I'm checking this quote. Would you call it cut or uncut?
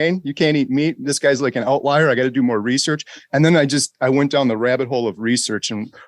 uncut